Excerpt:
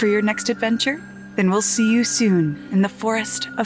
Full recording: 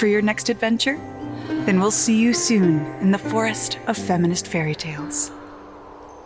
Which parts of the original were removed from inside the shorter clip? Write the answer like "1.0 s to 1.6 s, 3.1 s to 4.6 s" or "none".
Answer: 1.2 s to 1.5 s